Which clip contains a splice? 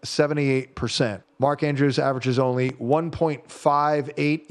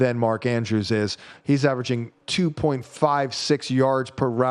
first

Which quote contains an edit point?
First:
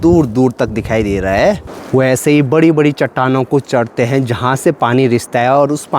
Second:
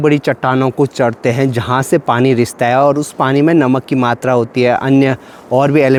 first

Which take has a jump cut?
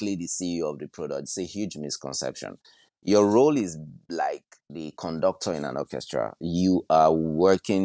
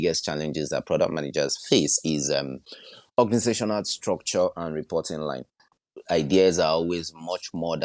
second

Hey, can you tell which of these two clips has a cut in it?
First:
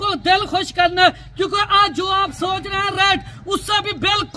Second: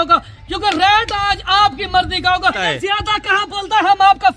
second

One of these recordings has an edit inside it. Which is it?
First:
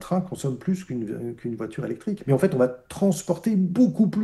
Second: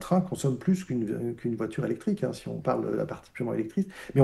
first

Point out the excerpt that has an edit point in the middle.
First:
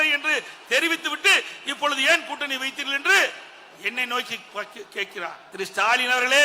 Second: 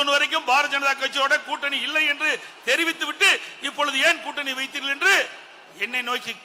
first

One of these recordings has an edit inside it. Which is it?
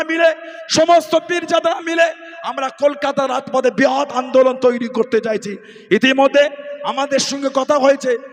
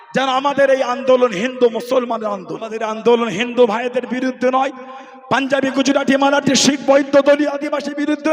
second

